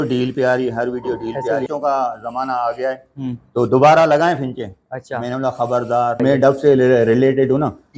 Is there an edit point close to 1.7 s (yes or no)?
yes